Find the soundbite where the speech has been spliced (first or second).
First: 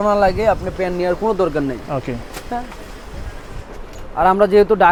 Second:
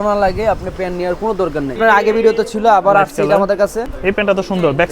second